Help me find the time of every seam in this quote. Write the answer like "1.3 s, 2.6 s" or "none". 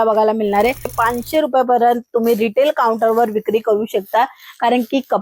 0.9 s

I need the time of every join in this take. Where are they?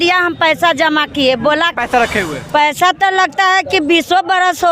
1.8 s

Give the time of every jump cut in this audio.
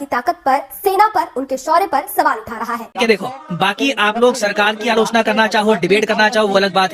3.0 s

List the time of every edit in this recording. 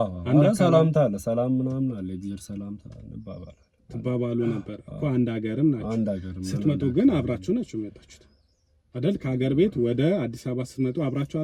none

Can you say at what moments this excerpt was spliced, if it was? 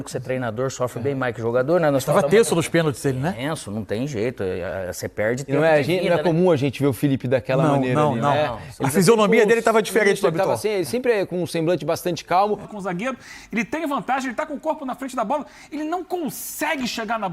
12.7 s

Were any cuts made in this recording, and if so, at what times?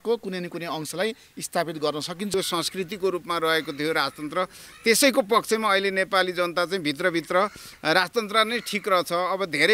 2.3 s

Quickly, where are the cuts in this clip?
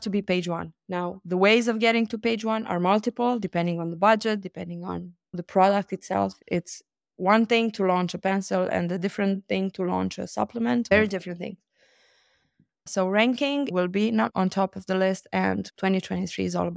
10.9 s, 12.9 s, 13.7 s, 15.7 s

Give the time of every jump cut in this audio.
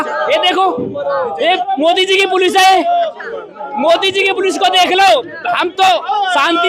none

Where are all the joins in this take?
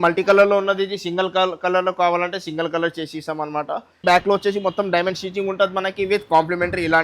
4.0 s

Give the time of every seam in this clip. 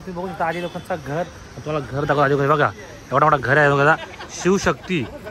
none

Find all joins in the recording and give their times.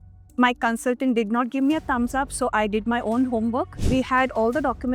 3.8 s

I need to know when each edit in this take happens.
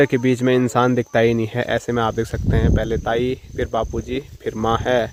none

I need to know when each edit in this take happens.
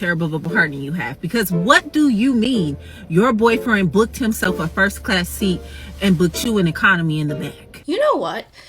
7.8 s

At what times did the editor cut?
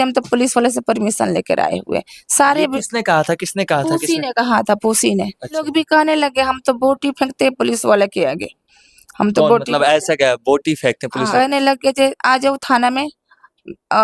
5.7 s, 11.3 s

